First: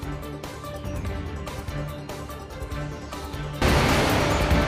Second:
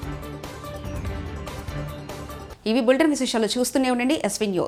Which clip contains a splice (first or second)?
first